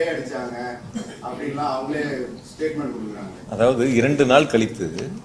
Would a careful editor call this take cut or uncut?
uncut